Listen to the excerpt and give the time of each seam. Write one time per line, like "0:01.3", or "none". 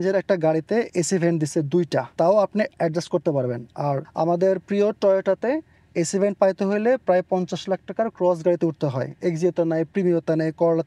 0:02.1
0:04.1

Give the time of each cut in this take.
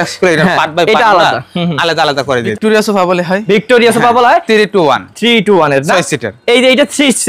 0:02.5

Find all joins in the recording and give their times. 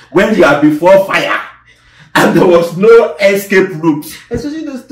none

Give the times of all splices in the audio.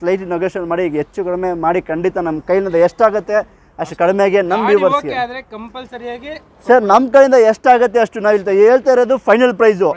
none

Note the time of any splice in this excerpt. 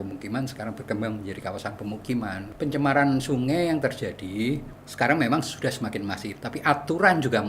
0:02.4
0:04.8

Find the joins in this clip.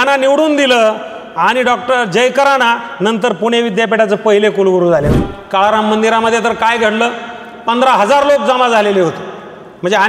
0:05.1

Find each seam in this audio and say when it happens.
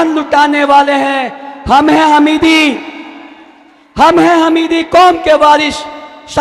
none

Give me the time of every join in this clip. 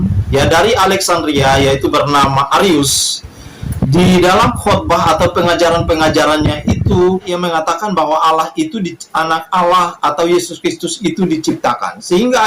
0:07.3

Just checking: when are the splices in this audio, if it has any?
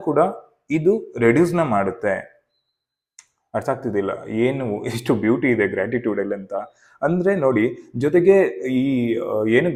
none

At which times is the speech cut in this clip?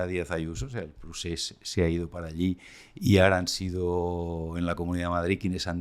none

